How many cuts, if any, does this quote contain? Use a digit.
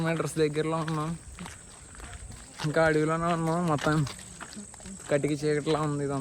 1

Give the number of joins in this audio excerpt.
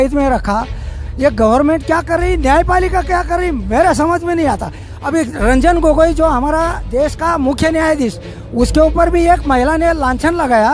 1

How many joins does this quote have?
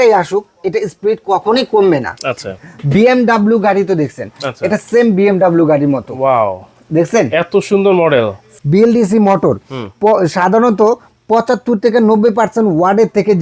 2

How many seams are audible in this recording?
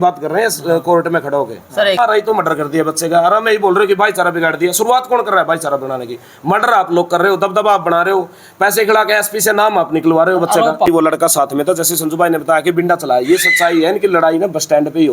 2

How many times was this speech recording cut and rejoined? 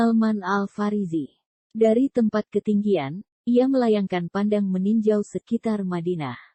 0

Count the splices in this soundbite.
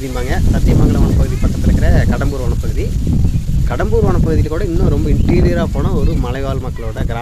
0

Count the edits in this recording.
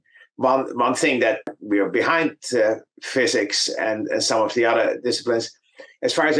1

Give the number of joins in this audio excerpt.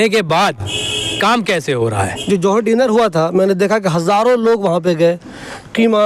1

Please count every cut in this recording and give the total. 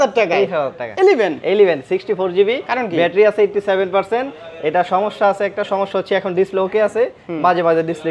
0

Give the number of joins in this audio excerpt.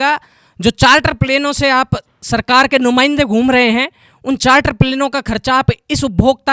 0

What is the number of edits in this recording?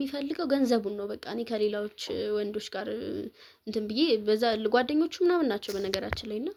0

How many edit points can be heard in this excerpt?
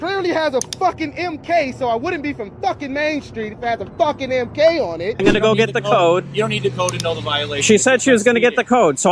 1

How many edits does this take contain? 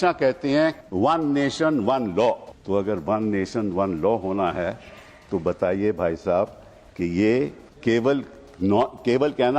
3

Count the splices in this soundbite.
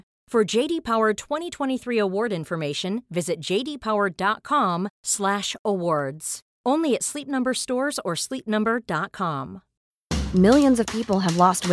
0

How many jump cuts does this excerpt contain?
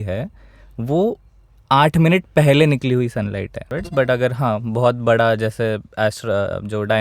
1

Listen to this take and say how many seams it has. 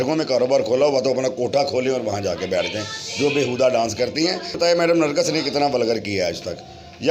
1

